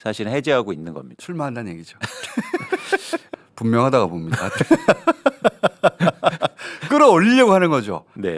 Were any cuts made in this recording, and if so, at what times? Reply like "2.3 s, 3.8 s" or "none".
3.3 s